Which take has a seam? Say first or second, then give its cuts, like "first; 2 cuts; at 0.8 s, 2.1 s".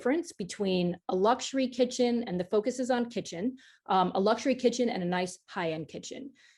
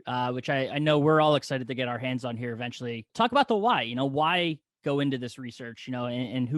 second; 1 cut; at 3.0 s